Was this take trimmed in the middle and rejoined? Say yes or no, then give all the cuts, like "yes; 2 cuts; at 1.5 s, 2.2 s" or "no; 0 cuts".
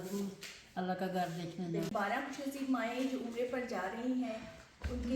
yes; 1 cut; at 1.9 s